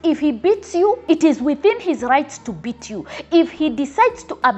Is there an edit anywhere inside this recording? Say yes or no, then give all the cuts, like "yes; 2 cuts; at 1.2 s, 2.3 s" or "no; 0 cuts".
yes; 1 cut; at 1.0 s